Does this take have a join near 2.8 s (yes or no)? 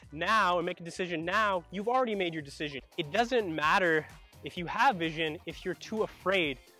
yes